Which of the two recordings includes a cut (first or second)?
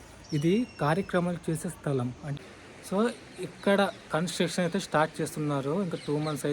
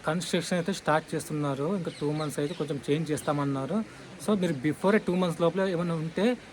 first